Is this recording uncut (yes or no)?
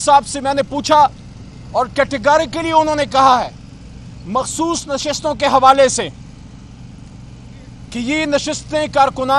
yes